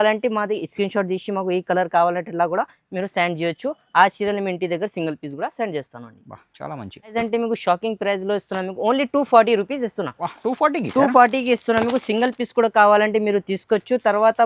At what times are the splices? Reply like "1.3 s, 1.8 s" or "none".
7.1 s